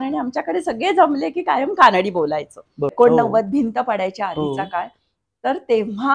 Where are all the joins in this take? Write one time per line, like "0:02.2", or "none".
0:02.9